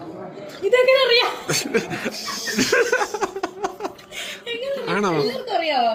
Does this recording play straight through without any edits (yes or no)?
yes